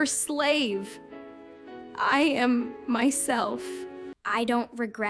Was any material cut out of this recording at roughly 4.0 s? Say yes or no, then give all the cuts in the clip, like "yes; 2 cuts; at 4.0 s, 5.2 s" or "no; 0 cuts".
yes; 1 cut; at 4.0 s